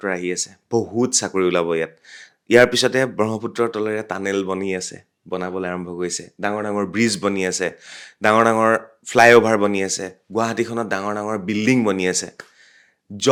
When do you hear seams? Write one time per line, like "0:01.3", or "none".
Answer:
none